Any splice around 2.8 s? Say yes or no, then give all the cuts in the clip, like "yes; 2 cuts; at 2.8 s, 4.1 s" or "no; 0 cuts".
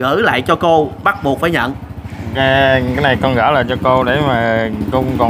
no; 0 cuts